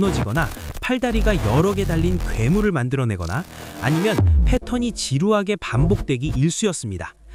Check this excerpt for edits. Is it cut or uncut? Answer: uncut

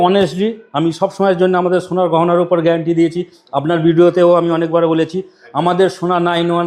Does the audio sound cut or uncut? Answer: uncut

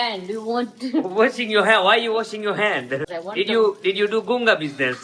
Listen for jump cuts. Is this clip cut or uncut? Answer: uncut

